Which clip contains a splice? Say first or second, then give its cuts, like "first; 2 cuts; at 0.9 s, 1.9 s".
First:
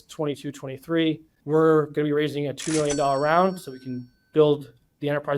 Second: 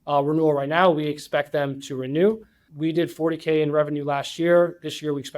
second; 1 cut; at 2.6 s